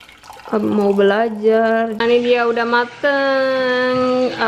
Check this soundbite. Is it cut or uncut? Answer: cut